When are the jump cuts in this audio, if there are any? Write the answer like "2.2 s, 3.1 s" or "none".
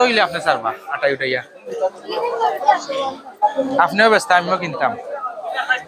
none